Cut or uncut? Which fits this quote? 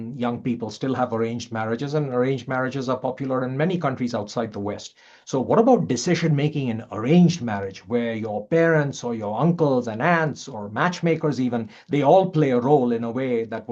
uncut